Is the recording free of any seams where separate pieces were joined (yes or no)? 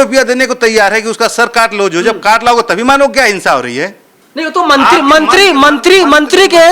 yes